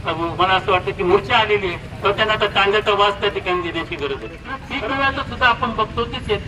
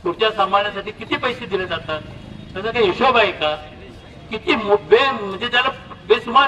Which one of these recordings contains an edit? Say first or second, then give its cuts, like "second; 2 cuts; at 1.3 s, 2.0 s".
first; 1 cut; at 4.6 s